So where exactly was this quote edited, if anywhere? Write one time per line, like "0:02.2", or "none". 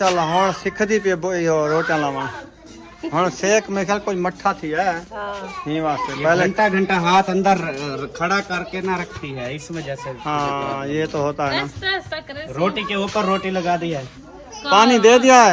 none

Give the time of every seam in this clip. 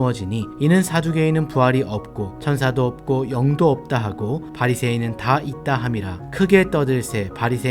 0:06.2

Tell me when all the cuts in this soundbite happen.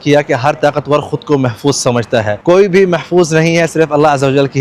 0:02.3

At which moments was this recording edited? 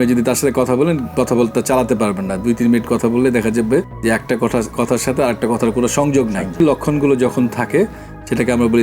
0:06.6

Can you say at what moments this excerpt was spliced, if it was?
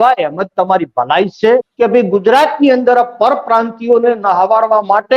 0:01.7

